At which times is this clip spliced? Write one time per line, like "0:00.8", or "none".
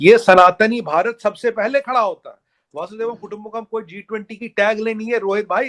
none